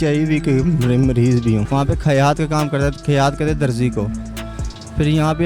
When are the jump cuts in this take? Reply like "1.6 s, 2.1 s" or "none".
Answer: 1.7 s